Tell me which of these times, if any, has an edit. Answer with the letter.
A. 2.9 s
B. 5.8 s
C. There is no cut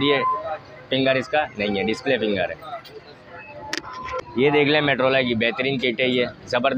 C